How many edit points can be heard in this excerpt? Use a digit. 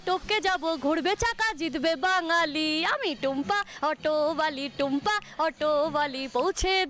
0